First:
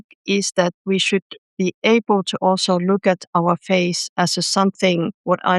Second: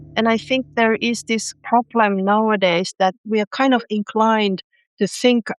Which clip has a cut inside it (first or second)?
second